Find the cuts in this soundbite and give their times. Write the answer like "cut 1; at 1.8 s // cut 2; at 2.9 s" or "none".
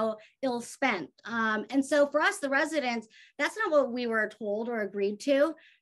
none